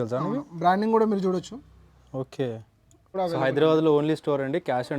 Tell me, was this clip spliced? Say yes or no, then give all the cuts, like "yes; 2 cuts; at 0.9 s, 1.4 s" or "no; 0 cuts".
yes; 1 cut; at 3.1 s